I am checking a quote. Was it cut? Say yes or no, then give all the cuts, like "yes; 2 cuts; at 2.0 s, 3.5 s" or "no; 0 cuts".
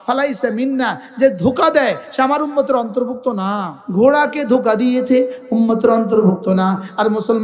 yes; 1 cut; at 3.8 s